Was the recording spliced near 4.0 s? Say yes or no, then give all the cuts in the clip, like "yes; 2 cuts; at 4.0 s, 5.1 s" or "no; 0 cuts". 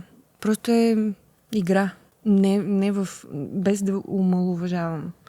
no; 2 cuts; at 1.3 s, 2.1 s